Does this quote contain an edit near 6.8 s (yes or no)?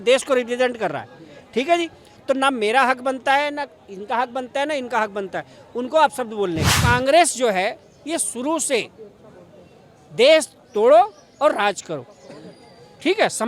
yes